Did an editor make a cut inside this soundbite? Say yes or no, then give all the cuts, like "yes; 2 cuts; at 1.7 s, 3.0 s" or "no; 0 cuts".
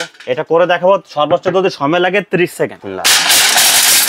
yes; 1 cut; at 2.9 s